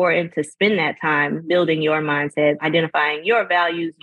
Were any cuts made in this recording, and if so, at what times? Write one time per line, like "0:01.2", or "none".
0:01.4
0:02.6